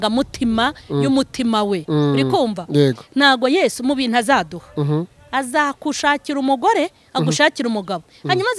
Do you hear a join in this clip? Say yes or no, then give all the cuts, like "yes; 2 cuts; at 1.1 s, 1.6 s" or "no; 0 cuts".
no; 0 cuts